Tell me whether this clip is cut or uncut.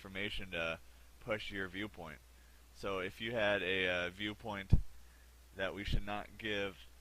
cut